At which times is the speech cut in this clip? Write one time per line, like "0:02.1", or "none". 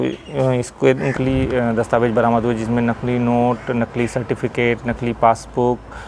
0:01.1